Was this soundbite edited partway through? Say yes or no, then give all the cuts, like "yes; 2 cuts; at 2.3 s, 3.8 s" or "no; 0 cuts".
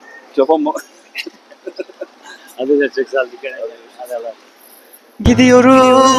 no; 0 cuts